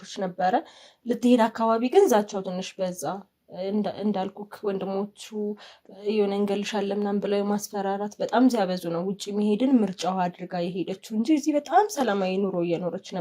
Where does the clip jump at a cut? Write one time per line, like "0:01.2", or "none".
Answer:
none